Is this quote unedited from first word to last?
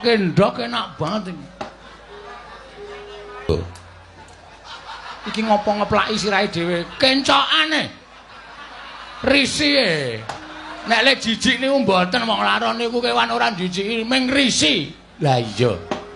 no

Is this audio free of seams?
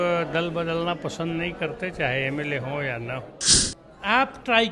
no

